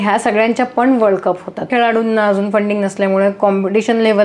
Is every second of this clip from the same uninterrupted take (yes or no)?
no